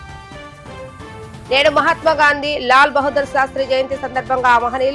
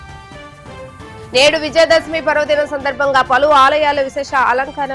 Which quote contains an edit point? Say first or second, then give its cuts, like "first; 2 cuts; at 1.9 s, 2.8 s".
second; 1 cut; at 1.3 s